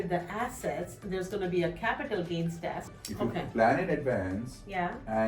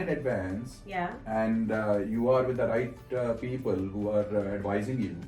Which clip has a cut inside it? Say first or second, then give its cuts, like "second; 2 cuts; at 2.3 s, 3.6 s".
first; 1 cut; at 2.9 s